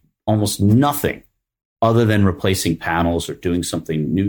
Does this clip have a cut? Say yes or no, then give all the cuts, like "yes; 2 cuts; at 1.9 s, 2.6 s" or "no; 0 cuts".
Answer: no; 0 cuts